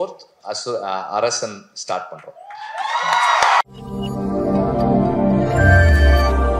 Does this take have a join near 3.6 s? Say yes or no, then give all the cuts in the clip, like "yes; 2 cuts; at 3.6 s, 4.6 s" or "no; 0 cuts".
yes; 1 cut; at 3.6 s